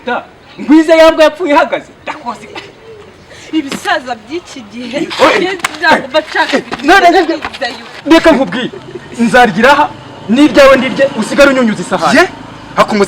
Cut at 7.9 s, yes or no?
yes